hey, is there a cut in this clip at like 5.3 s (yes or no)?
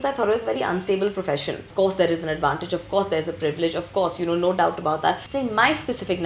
yes